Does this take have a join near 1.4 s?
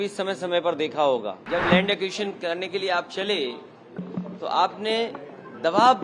yes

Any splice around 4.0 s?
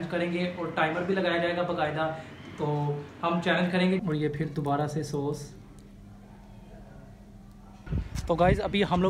yes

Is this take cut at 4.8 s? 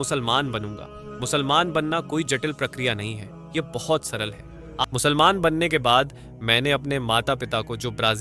yes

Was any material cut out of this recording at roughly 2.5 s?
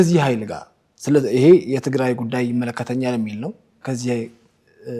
no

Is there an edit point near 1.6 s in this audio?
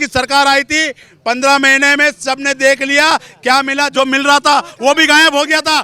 no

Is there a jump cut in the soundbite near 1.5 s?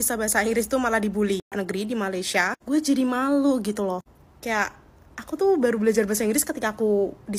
yes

